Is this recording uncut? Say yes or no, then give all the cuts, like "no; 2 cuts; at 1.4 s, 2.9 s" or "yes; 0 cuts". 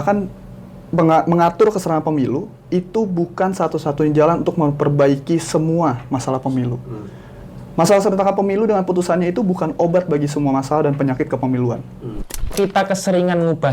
no; 1 cut; at 12.5 s